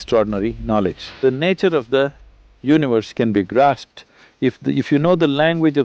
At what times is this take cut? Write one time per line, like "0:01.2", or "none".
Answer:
0:01.0